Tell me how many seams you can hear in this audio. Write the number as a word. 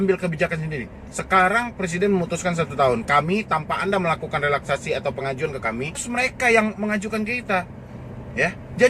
one